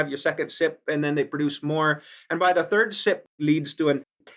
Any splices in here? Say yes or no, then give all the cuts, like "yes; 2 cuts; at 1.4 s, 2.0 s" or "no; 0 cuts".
yes; 1 cut; at 3.4 s